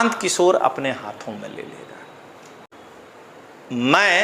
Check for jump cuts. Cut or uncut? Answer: cut